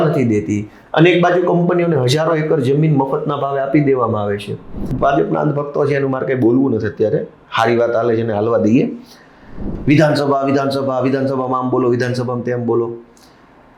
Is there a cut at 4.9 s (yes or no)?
yes